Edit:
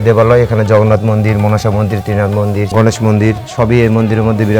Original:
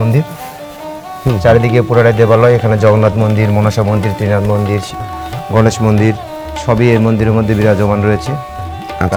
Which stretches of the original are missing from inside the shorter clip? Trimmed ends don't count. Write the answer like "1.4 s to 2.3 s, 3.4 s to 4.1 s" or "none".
4.8 s to 5.5 s, 6.2 s to 6.5 s